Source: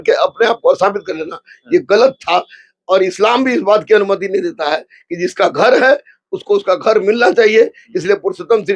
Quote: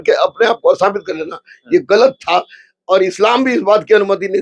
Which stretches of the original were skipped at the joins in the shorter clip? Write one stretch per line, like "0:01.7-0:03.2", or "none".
none